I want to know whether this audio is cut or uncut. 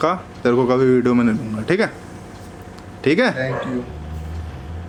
uncut